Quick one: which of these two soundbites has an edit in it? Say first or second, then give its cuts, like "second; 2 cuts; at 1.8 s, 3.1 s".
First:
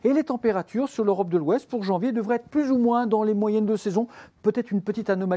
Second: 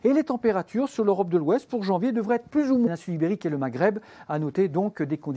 first; 1 cut; at 2.9 s